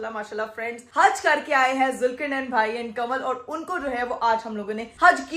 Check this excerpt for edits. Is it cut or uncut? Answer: uncut